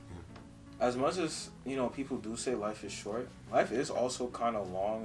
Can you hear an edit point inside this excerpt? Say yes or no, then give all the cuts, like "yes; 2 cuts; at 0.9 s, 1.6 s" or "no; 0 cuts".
no; 0 cuts